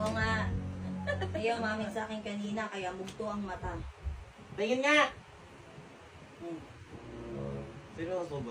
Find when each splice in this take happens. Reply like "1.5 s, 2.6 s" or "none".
none